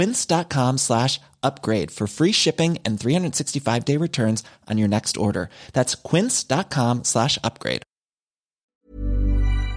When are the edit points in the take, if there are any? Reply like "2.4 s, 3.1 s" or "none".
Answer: 8.7 s

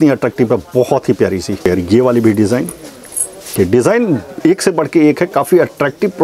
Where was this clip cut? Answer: 1.6 s, 3.5 s

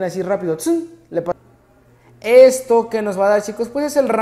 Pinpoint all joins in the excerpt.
1.3 s

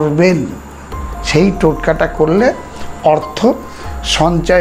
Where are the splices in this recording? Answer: none

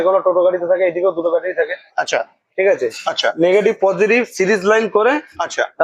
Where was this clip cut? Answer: none

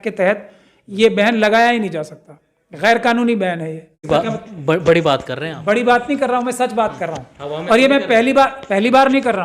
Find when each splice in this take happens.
4.0 s

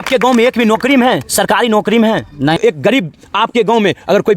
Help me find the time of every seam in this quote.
2.6 s

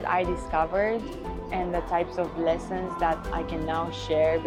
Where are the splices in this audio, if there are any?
none

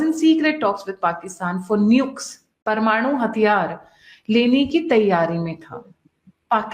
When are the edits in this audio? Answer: 2.6 s

